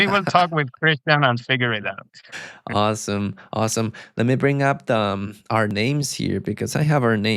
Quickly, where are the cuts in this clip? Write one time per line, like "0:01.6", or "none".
none